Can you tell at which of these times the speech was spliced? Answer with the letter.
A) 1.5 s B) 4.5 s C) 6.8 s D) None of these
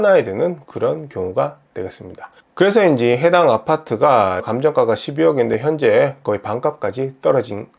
B